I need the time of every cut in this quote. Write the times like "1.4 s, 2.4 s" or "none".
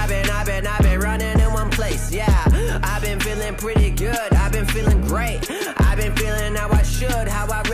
none